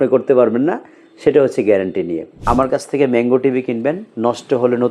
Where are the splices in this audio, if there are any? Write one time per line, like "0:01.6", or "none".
0:02.4